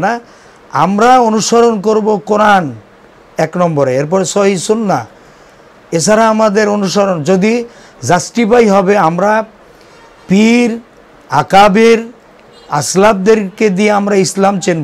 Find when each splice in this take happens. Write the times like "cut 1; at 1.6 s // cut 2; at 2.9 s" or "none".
none